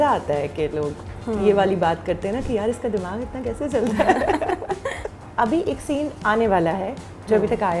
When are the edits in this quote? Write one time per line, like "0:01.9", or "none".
0:05.0